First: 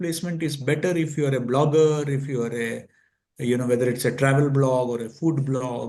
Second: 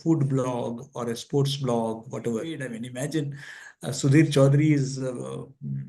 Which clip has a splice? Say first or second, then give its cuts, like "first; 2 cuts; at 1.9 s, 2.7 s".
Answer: second; 1 cut; at 2.6 s